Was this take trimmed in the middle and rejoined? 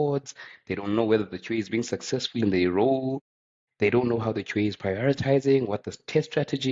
no; 0 cuts

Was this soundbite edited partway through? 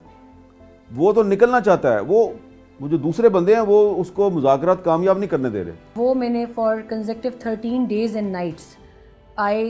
yes; 1 cut; at 5.8 s

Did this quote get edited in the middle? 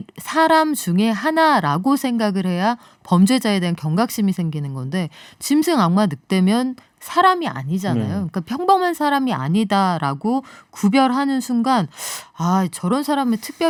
no; 0 cuts

